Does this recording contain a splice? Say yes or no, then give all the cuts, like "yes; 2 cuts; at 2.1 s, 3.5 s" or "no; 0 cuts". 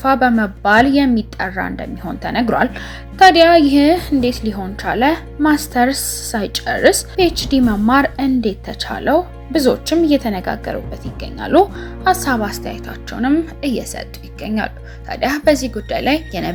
no; 0 cuts